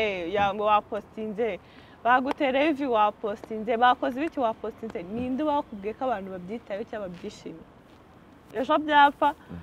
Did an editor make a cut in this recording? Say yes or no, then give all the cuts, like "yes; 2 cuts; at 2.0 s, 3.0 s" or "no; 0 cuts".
no; 0 cuts